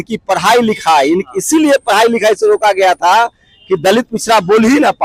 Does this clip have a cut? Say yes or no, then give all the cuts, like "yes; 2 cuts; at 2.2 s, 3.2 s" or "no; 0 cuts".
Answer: no; 0 cuts